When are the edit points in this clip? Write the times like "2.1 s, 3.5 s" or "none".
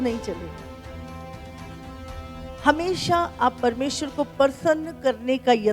none